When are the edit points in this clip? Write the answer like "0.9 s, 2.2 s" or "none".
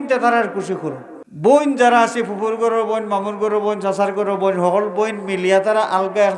1.5 s